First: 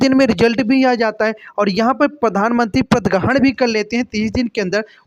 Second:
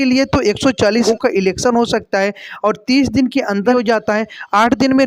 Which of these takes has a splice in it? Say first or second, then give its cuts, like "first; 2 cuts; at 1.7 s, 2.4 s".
second; 2 cuts; at 1.1 s, 3.7 s